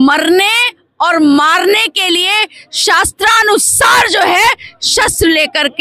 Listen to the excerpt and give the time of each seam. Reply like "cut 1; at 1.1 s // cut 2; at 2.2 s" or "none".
none